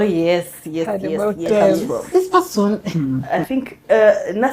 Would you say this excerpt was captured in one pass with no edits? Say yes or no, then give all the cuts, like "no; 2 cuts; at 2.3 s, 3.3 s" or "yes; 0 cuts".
no; 1 cut; at 2.9 s